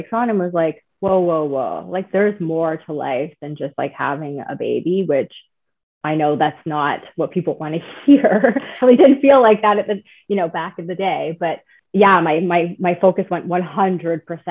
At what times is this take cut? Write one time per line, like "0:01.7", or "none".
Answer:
0:08.8
0:11.7